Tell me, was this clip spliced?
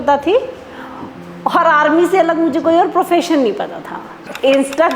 yes; 1 cut; at 4.0 s

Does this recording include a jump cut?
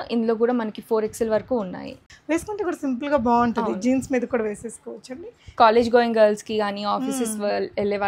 yes; 1 cut; at 2.1 s

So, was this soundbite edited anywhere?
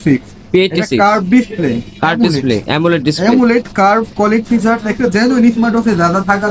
no; 0 cuts

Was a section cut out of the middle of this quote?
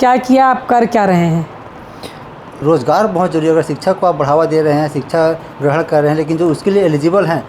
yes; 1 cut; at 2.5 s

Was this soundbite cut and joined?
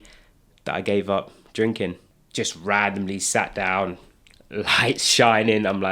yes; 1 cut; at 2.2 s

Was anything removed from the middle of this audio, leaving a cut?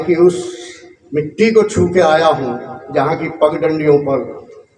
no; 0 cuts

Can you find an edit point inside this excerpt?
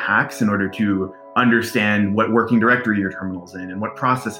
no; 0 cuts

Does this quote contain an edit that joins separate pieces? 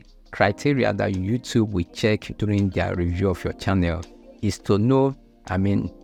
no; 0 cuts

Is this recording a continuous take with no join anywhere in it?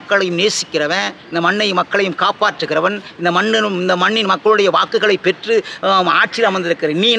yes; 0 cuts

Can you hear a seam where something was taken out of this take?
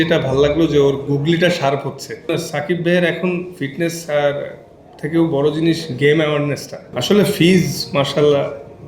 yes; 2 cuts; at 2.3 s, 6.9 s

